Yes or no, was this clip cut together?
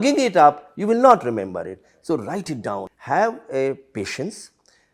yes